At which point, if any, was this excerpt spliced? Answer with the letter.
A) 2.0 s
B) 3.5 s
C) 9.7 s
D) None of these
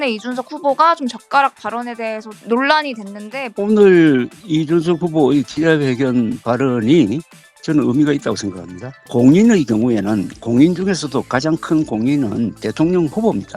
B